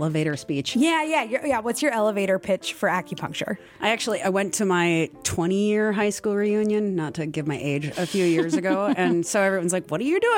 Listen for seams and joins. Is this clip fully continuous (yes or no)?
yes